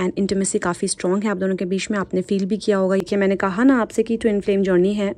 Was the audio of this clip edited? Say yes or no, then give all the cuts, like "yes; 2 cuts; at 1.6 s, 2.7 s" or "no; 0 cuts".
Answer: yes; 1 cut; at 3.0 s